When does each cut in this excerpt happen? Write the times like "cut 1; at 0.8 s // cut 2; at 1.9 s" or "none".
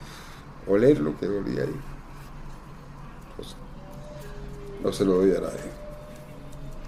none